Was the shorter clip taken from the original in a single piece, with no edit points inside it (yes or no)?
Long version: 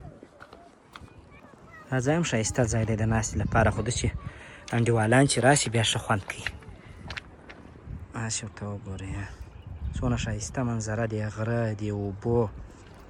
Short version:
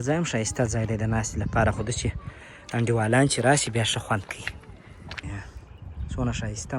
no